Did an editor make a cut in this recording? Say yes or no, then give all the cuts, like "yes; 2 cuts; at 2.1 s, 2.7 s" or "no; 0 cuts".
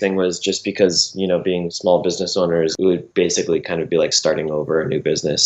yes; 2 cuts; at 1.7 s, 2.7 s